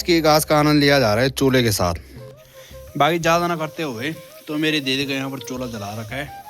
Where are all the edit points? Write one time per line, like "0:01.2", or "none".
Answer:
0:02.2